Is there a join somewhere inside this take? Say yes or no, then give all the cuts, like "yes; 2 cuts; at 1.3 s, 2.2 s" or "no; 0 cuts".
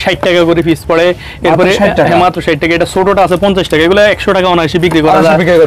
no; 0 cuts